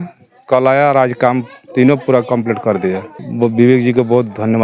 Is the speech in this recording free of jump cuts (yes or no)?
no